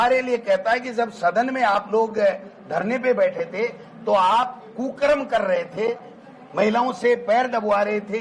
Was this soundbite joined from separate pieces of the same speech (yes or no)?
no